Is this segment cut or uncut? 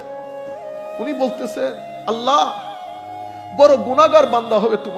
cut